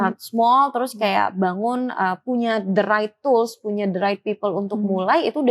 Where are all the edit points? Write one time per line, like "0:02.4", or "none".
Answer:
none